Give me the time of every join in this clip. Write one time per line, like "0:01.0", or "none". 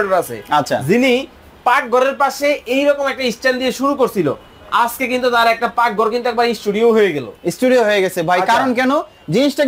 none